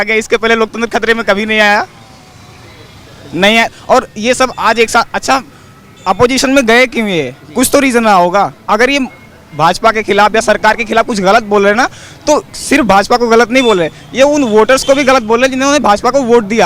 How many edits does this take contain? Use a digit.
0